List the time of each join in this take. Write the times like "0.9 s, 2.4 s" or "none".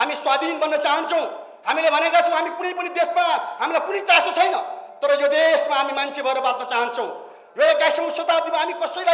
none